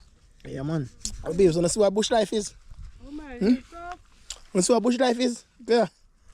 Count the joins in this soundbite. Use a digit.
1